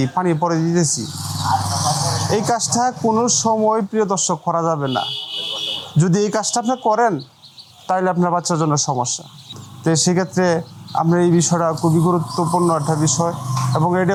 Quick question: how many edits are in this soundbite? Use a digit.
0